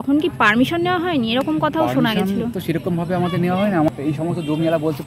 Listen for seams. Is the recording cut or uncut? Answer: cut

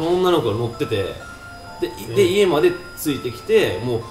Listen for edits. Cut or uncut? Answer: uncut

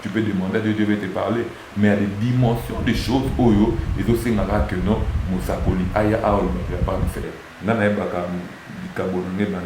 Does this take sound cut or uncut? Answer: cut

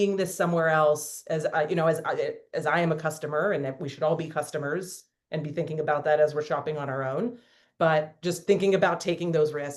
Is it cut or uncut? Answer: uncut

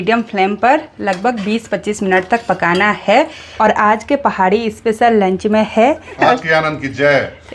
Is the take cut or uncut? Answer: cut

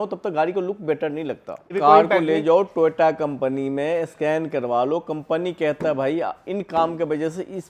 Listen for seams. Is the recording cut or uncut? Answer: cut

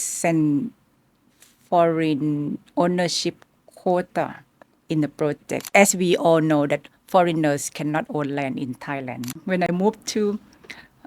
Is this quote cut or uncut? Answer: cut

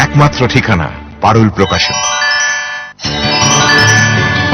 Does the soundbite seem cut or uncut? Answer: cut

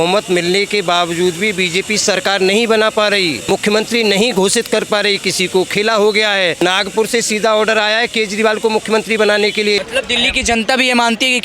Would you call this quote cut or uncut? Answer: cut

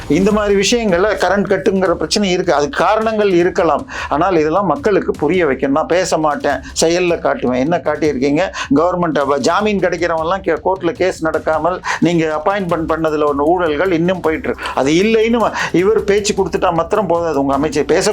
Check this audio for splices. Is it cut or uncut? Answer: cut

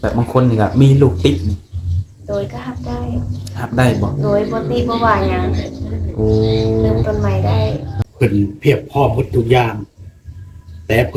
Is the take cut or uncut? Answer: cut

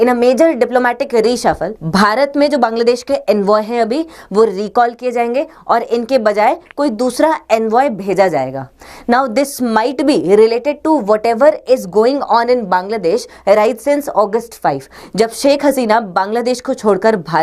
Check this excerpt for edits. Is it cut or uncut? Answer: cut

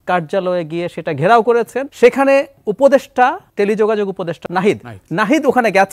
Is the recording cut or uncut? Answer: cut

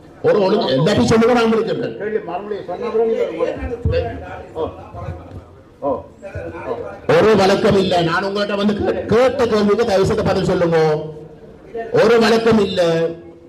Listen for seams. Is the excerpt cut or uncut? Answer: uncut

